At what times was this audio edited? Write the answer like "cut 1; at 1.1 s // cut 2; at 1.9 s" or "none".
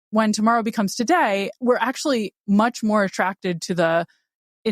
cut 1; at 1.5 s